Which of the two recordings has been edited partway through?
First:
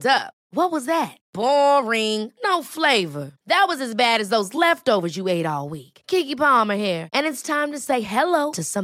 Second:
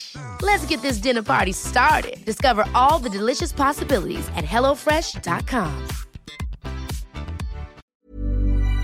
second; 1 cut; at 7.8 s

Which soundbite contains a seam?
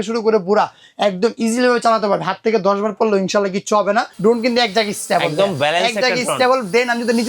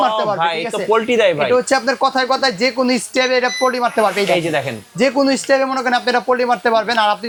first; 1 cut; at 4.1 s

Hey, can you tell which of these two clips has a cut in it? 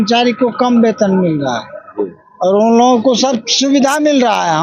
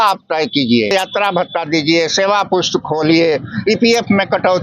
second; 1 cut; at 0.9 s

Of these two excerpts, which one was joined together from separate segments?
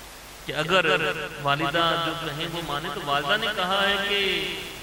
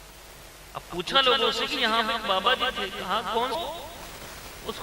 second; 1 cut; at 3.6 s

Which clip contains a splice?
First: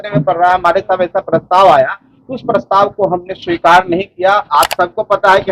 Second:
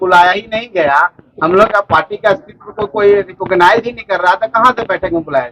first; 1 cut; at 4.4 s

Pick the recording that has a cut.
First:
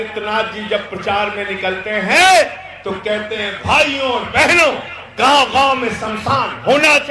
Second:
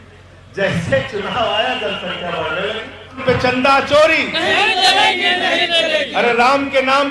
second; 1 cut; at 3.2 s

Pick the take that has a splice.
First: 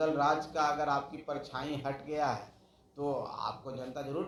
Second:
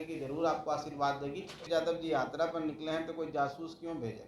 second; 1 cut; at 1.6 s

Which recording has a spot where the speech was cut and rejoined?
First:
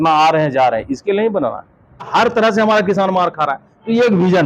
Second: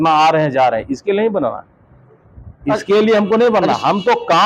first; 1 cut; at 2.1 s

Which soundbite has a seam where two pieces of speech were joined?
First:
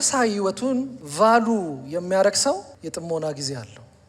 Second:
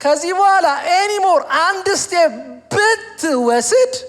first; 2 cuts; at 1.0 s, 2.7 s

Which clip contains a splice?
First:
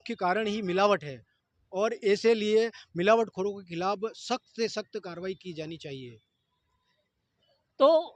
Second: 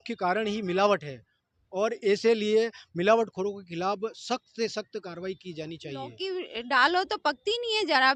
second; 1 cut; at 6.1 s

